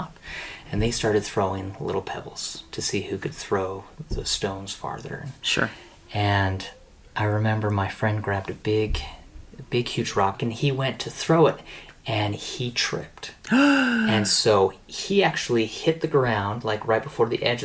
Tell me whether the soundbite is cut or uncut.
cut